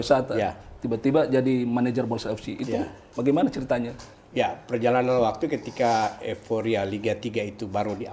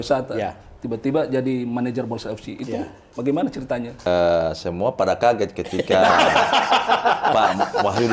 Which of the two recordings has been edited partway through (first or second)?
second